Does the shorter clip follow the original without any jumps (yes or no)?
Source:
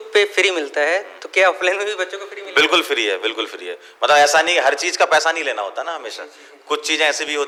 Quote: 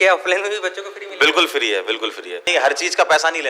no